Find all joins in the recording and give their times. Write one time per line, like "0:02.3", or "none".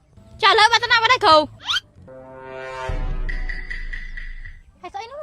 0:01.6